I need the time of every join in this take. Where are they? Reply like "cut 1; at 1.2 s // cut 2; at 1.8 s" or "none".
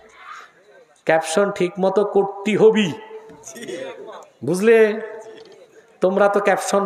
none